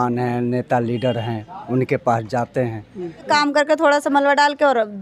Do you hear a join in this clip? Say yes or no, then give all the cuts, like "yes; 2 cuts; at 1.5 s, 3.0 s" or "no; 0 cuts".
yes; 1 cut; at 3.2 s